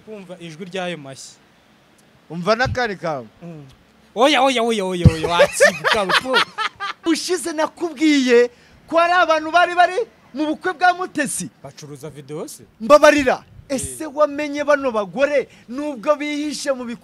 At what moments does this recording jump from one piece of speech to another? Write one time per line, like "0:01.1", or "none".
0:07.0